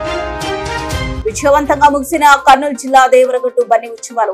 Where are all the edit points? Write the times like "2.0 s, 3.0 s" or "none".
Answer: 1.1 s